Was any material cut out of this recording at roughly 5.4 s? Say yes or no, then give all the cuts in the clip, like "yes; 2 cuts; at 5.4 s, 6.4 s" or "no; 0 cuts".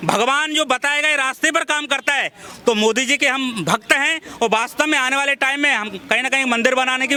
no; 0 cuts